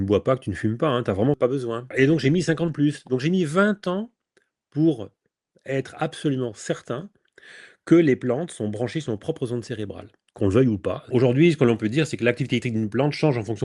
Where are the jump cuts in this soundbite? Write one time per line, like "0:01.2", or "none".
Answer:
0:01.4
0:11.1